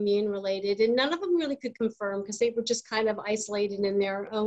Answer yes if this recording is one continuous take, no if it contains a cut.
yes